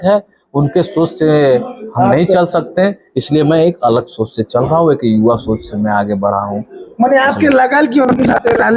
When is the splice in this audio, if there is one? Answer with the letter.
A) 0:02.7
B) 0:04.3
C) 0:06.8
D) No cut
D